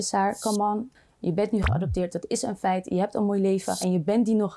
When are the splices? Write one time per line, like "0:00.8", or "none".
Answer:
0:00.9